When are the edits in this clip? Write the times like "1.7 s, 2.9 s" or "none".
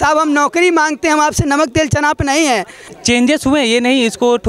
2.8 s